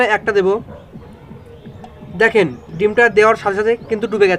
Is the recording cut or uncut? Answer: uncut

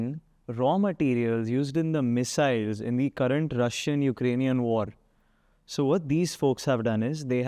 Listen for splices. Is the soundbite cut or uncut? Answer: uncut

